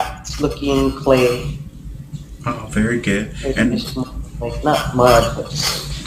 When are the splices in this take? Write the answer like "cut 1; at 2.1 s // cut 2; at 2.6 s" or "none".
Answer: cut 1; at 4.6 s